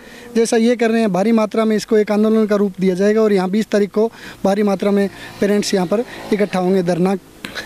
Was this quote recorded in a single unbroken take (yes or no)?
yes